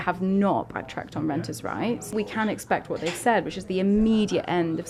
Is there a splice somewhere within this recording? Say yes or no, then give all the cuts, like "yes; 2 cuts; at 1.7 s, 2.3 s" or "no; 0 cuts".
yes; 1 cut; at 2.1 s